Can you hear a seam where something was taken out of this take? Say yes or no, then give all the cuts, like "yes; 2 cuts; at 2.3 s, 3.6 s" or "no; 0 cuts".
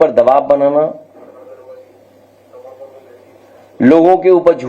no; 0 cuts